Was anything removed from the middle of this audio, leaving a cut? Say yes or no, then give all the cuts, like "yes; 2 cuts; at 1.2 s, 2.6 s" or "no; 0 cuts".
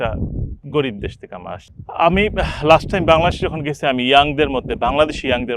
yes; 1 cut; at 1.7 s